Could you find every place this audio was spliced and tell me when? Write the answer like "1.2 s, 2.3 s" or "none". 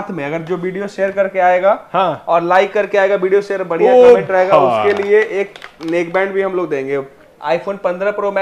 7.3 s